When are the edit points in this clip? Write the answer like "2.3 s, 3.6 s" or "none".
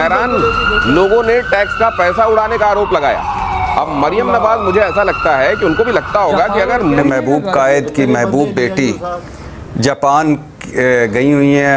7.0 s